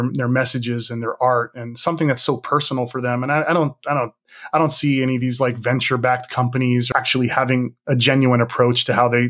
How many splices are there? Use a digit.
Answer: 1